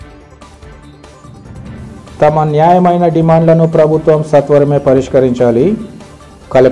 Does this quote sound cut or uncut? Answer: cut